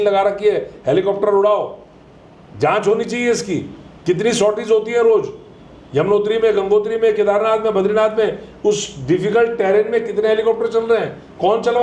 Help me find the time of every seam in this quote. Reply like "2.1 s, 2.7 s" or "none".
none